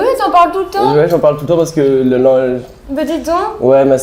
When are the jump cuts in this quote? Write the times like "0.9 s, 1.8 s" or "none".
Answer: none

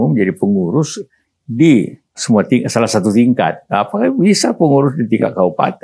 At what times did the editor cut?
2.2 s

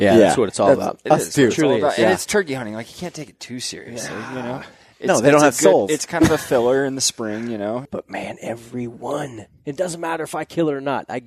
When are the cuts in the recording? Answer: 7.9 s

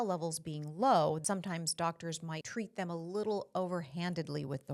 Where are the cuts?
1.2 s, 2.4 s

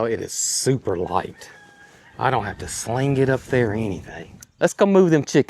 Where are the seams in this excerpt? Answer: 4.4 s

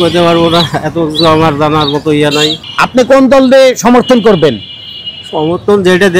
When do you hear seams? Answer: none

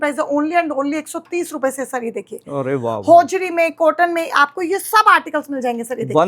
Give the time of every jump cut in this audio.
none

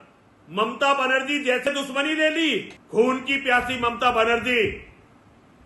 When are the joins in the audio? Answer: 1.6 s, 2.8 s

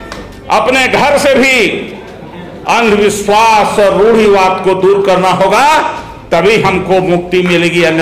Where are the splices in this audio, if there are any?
none

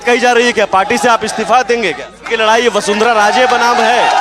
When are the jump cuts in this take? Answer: 2.1 s

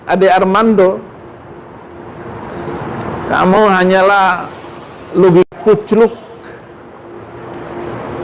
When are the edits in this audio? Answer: none

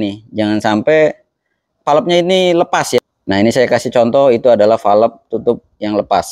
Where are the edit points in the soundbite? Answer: 3.0 s

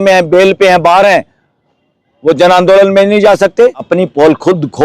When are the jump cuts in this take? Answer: 3.8 s

